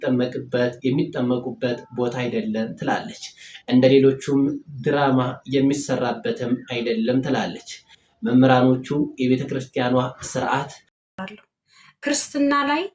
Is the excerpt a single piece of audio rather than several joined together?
no; 1 cut; at 11.1 s

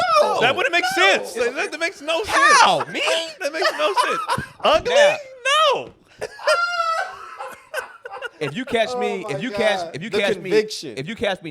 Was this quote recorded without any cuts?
yes; 0 cuts

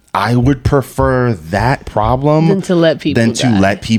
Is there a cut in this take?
no; 0 cuts

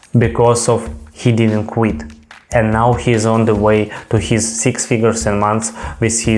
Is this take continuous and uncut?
yes; 0 cuts

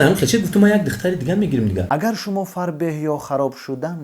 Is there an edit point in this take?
yes; 1 cut; at 1.8 s

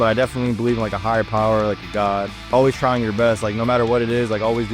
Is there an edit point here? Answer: yes; 1 cut; at 2.5 s

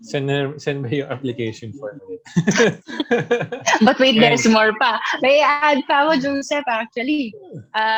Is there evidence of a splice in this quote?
no; 0 cuts

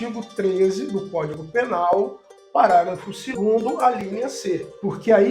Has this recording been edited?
yes; 1 cut; at 3.3 s

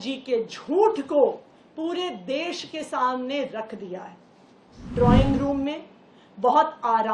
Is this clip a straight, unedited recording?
no; 1 cut; at 4.9 s

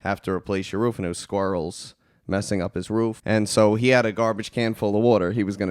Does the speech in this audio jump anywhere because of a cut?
yes; 1 cut; at 3.2 s

